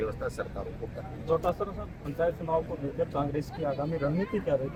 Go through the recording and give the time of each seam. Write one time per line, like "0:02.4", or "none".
none